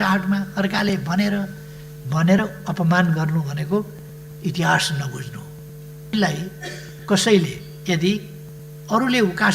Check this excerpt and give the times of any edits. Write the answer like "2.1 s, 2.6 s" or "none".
6.1 s